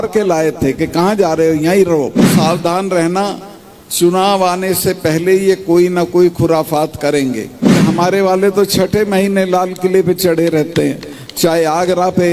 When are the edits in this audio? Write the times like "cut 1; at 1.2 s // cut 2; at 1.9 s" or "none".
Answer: cut 1; at 2.3 s // cut 2; at 7.8 s